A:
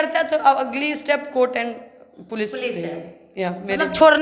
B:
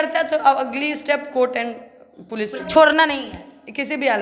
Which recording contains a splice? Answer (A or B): B